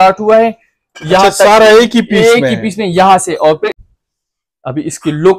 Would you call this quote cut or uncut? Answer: cut